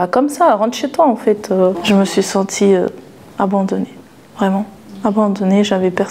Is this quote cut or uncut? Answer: uncut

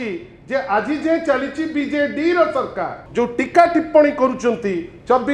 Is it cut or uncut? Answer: cut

